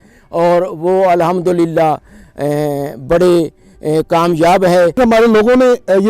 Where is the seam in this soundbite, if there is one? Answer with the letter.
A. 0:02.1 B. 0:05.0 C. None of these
B